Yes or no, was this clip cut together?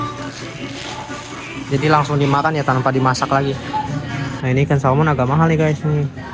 yes